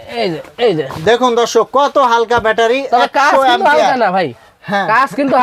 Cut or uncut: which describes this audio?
uncut